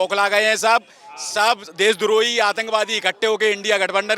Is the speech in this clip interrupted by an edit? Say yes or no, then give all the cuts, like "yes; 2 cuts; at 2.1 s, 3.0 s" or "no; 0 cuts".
no; 0 cuts